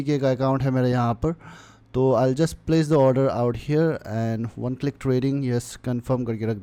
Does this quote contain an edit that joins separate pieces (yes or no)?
no